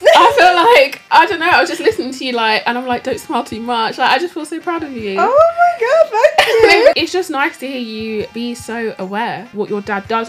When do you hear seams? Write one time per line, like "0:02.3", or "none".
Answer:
0:06.9
0:08.3
0:09.5